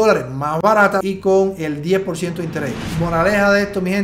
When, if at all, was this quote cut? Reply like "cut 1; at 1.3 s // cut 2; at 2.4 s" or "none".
cut 1; at 1.0 s // cut 2; at 2.8 s